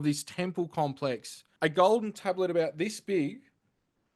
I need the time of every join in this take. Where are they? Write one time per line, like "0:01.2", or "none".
0:01.4